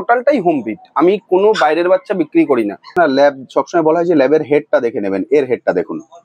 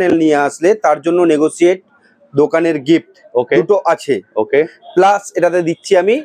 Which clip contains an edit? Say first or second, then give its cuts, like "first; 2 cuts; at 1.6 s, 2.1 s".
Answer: first; 1 cut; at 2.9 s